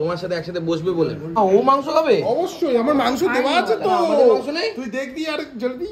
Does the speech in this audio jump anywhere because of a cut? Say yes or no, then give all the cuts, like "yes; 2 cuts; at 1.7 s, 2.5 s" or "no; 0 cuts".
yes; 1 cut; at 1.4 s